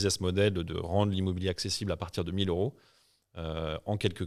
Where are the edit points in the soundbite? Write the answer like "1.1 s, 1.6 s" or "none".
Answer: none